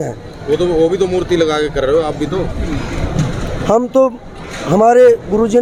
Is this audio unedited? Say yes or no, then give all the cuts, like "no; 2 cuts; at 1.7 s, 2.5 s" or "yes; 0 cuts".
yes; 0 cuts